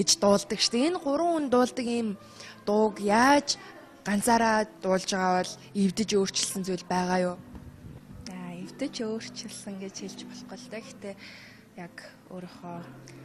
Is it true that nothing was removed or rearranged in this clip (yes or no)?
no